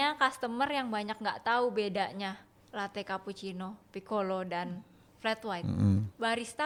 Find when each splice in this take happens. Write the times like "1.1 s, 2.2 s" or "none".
none